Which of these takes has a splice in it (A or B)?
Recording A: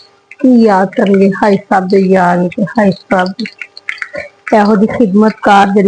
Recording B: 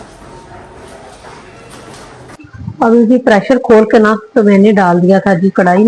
B